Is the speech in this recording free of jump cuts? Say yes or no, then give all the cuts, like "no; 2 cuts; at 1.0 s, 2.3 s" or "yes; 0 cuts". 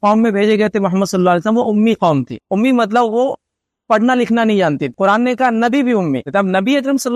no; 3 cuts; at 2.4 s, 4.9 s, 6.3 s